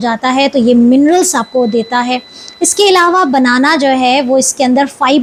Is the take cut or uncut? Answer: uncut